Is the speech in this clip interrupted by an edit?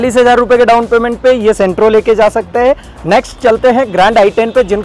no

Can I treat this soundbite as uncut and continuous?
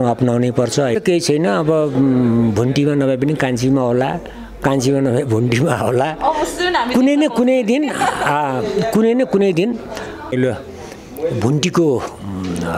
no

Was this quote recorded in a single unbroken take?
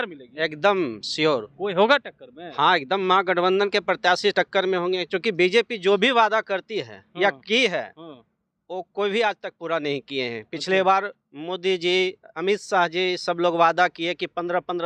yes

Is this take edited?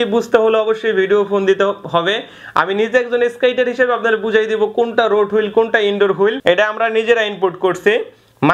yes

